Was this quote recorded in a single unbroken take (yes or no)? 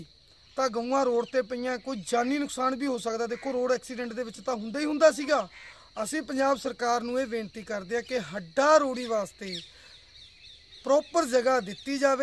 yes